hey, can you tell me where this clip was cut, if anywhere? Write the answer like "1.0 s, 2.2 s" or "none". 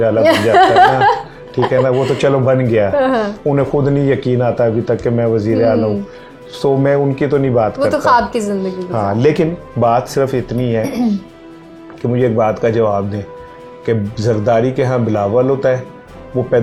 none